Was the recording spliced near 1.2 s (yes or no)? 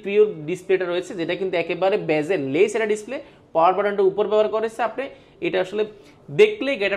no